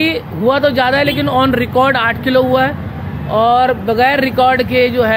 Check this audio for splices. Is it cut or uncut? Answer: uncut